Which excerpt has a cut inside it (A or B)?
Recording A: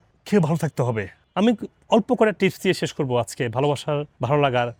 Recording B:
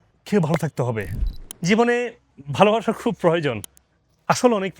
B